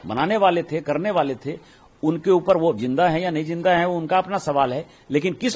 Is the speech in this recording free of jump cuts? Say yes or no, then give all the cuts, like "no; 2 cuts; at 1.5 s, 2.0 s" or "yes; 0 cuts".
yes; 0 cuts